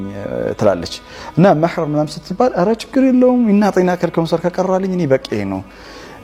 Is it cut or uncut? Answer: uncut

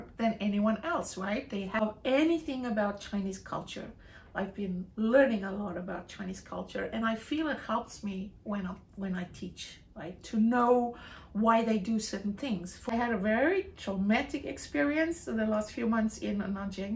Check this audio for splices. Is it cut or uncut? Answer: cut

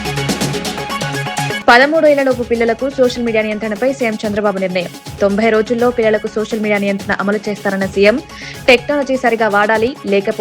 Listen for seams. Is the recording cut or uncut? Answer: cut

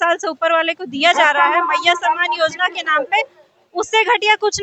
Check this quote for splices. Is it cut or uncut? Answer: uncut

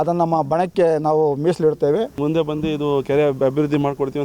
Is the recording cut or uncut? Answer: cut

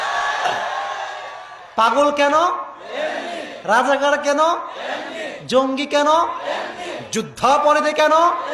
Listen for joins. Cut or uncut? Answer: uncut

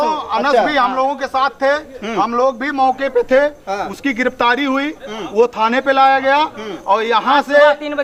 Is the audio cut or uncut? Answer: uncut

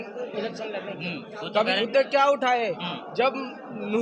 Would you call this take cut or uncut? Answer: cut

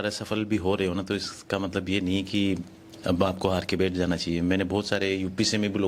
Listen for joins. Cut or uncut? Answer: uncut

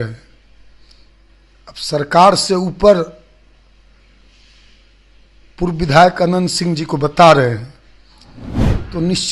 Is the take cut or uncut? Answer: uncut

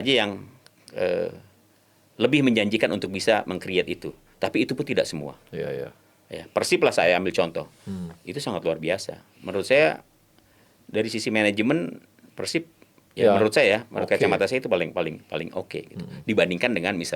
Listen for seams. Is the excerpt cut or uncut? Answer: uncut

